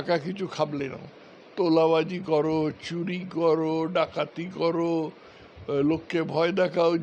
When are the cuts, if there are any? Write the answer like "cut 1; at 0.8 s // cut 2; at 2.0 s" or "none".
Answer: none